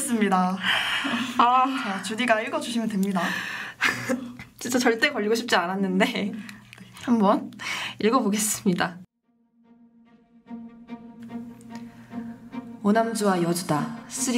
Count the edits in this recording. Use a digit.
1